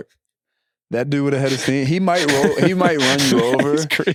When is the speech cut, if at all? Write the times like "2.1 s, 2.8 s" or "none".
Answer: none